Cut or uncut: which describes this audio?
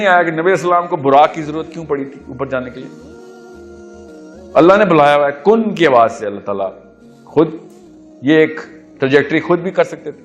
cut